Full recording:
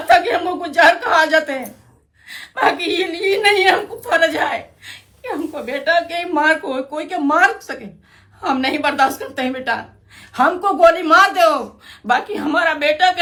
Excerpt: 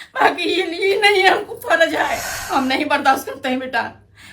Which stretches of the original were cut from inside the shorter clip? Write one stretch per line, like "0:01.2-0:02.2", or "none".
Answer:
0:04.7-0:08.3

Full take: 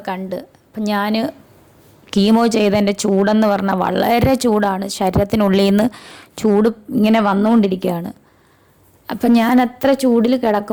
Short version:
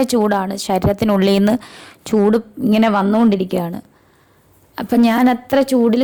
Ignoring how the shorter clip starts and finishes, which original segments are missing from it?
none

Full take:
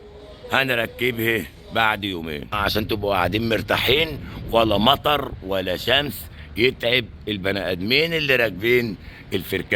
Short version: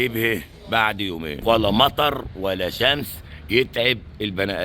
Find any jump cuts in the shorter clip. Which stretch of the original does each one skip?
0:02.3-0:04.3

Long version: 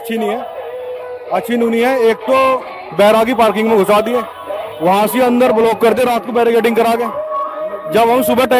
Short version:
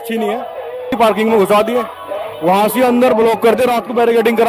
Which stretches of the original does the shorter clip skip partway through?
0:00.9-0:03.3

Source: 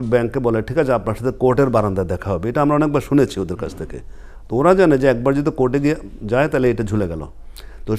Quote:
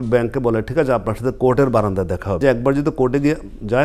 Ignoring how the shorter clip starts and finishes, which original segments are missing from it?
0:02.4-0:05.0

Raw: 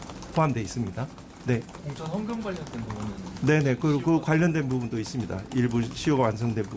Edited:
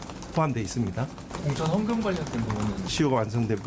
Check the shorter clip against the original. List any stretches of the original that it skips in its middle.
0:01.3-0:01.7
0:03.3-0:05.9

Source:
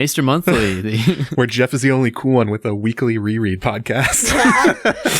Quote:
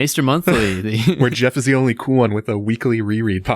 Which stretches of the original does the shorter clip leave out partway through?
0:01.2-0:01.3

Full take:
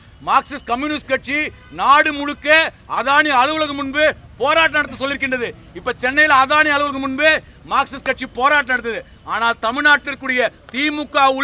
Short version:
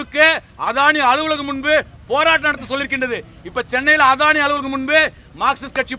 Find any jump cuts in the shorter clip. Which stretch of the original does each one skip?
none

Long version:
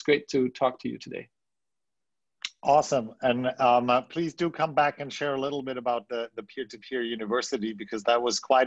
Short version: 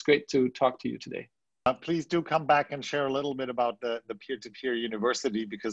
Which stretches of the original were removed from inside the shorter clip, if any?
0:01.7-0:03.9

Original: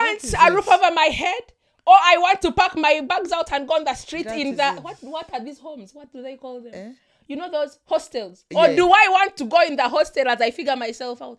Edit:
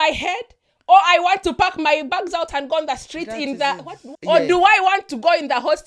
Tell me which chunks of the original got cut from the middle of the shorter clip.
0:05.1-0:08.4

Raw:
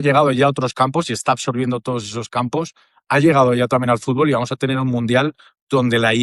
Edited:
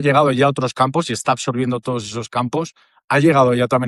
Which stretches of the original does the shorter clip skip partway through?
none

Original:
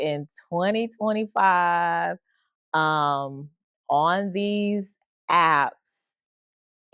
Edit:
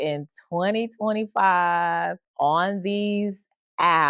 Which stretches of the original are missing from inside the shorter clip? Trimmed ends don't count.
0:02.2-0:03.7

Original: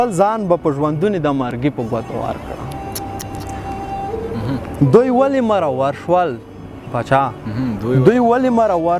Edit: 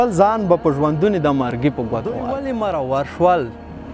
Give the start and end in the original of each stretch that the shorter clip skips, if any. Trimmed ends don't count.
0:02.3-0:05.2

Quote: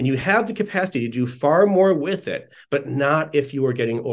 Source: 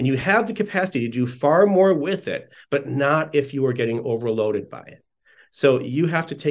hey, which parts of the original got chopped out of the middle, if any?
none

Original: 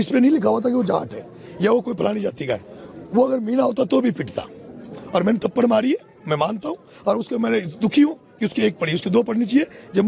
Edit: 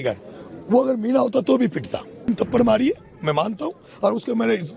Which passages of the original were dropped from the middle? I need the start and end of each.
0:04.7-0:05.3

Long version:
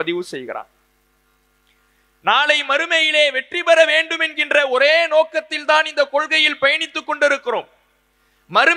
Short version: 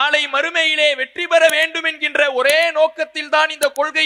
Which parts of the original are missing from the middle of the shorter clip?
none

